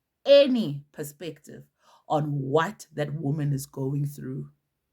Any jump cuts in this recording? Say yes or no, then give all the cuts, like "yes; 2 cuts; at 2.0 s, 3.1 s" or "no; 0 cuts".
no; 0 cuts